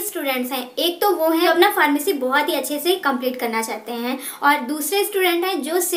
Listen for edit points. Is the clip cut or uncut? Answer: cut